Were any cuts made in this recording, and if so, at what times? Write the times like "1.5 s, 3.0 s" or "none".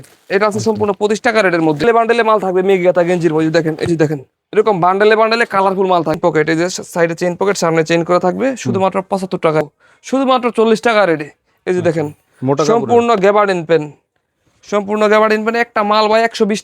1.8 s, 6.2 s, 9.6 s